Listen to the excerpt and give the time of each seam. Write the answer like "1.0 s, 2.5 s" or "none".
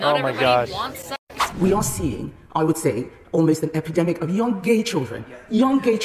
1.4 s

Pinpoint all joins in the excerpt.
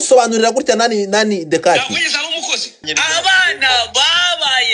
2.9 s

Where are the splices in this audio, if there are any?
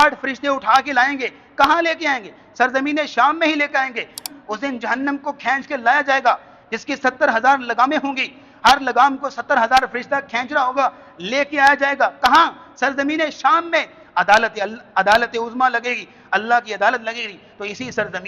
4.3 s

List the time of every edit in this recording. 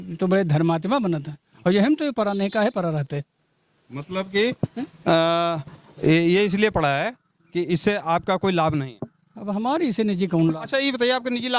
none

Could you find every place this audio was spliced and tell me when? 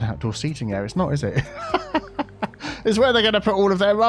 none

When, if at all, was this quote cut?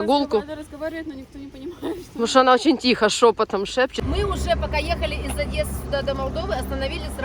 4.0 s

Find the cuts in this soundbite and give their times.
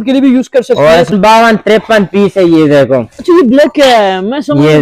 1.1 s

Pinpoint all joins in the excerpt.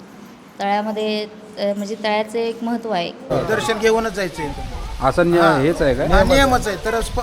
3.3 s

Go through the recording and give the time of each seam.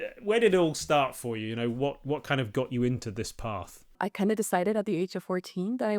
4.0 s

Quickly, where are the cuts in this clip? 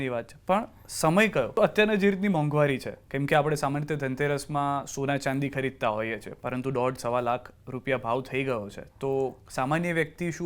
1.5 s

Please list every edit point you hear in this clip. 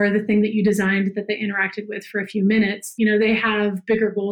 2.9 s

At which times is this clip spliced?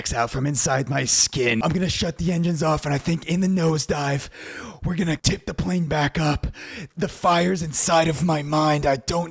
1.6 s, 5.2 s, 6.9 s

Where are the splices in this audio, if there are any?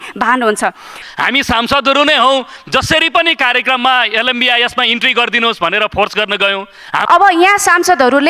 0.9 s, 6.9 s

